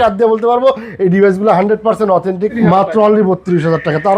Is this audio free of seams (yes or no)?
no